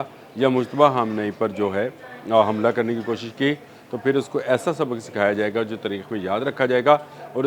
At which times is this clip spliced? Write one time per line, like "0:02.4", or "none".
none